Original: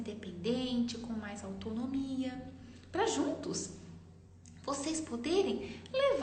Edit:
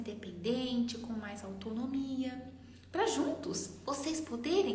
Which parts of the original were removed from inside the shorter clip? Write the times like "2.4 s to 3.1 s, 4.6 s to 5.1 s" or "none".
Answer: 3.7 s to 4.5 s